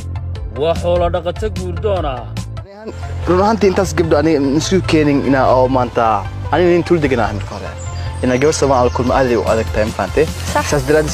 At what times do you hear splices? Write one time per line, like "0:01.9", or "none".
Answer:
0:02.9